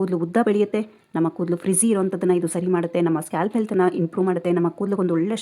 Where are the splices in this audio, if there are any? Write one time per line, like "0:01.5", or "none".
none